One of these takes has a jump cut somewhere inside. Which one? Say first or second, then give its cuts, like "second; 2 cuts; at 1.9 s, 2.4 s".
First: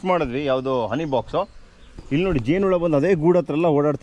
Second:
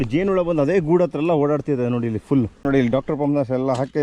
second; 1 cut; at 2.6 s